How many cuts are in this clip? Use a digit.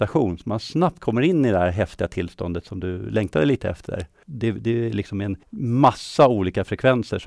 2